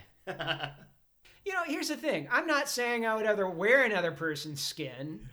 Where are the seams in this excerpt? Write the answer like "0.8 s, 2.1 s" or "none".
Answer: 1.2 s